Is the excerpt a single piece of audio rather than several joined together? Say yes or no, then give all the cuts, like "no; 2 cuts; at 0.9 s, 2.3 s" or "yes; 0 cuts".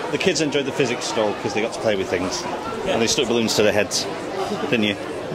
yes; 0 cuts